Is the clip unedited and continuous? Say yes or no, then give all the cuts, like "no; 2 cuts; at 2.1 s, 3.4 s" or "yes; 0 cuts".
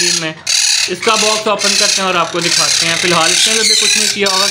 yes; 0 cuts